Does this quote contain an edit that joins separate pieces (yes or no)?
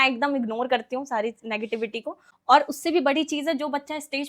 yes